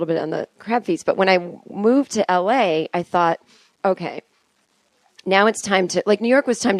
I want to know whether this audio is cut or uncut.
cut